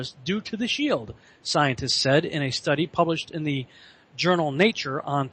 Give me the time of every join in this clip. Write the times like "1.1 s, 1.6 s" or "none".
3.5 s